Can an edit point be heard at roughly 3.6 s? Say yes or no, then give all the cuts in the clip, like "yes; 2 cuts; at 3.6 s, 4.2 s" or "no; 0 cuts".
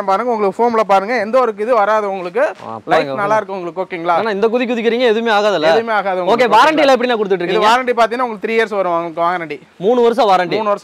no; 0 cuts